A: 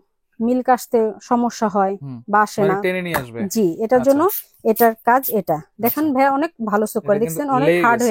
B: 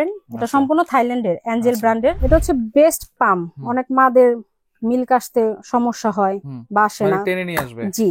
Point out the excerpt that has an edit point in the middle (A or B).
B